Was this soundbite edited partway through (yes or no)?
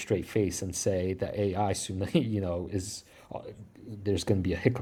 no